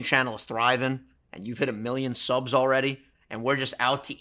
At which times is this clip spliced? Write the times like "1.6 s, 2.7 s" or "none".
none